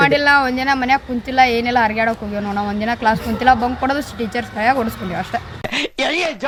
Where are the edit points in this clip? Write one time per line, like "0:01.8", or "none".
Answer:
none